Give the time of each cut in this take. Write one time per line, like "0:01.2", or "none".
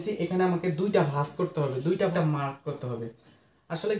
0:02.1